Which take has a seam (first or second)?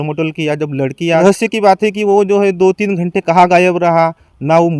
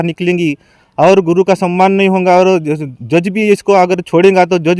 first